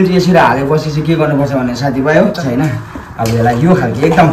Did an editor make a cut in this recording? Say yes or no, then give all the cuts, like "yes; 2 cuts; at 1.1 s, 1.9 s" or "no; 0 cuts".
yes; 1 cut; at 2.4 s